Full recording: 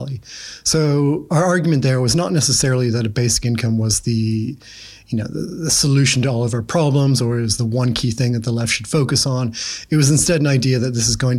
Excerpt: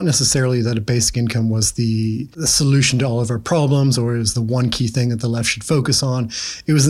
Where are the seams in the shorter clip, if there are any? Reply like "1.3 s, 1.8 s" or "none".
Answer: 2.4 s